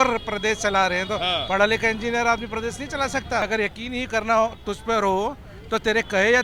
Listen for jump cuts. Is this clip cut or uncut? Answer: cut